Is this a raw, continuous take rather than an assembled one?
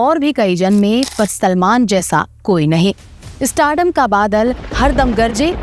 yes; 0 cuts

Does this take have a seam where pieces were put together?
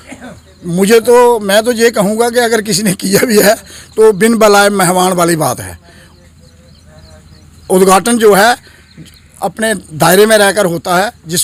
no; 0 cuts

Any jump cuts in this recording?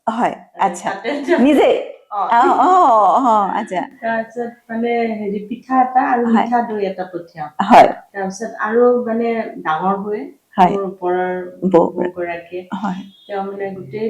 no; 0 cuts

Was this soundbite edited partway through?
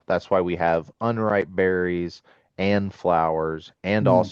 no; 0 cuts

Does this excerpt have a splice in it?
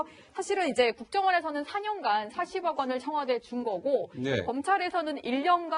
no; 0 cuts

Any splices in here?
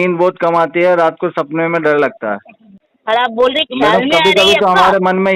yes; 1 cut; at 2.9 s

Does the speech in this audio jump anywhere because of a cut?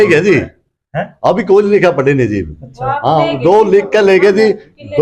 no; 0 cuts

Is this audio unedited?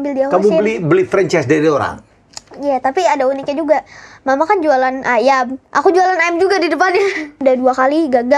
no; 1 cut; at 7.4 s

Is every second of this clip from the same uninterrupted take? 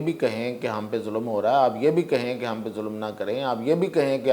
yes; 0 cuts

